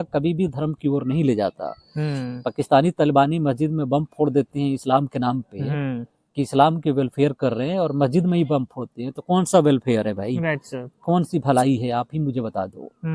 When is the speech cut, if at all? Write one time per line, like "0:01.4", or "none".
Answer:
none